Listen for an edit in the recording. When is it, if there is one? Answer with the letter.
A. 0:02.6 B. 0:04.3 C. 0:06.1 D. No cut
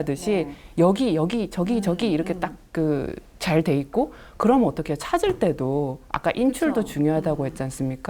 D